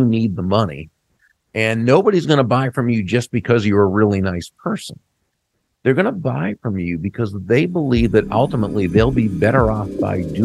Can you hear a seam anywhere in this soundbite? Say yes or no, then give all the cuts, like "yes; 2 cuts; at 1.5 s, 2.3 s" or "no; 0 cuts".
no; 0 cuts